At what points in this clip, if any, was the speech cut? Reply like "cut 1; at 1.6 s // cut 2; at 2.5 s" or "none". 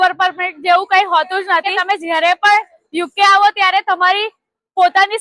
cut 1; at 1.7 s